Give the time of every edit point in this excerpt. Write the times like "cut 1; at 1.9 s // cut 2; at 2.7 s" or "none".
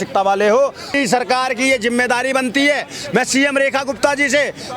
cut 1; at 0.9 s